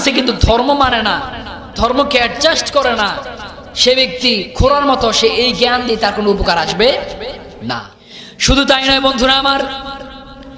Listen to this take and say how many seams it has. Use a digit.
1